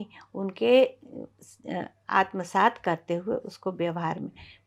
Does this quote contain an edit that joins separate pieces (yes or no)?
no